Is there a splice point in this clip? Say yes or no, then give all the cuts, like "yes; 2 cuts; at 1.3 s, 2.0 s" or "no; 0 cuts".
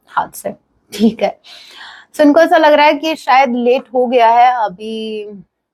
no; 0 cuts